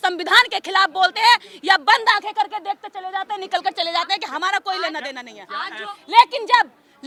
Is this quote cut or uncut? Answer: uncut